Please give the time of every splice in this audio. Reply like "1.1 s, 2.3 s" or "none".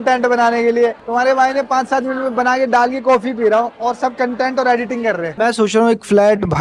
5.3 s